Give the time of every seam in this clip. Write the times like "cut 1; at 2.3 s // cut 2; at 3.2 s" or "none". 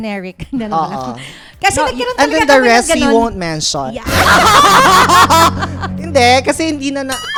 none